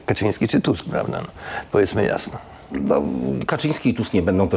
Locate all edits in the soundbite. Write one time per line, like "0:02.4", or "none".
none